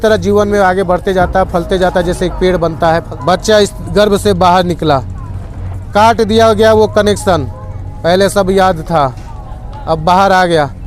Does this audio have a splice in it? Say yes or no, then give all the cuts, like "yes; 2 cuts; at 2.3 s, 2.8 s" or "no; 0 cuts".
yes; 1 cut; at 3.1 s